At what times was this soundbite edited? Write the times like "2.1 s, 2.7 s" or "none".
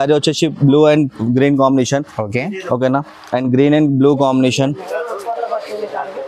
none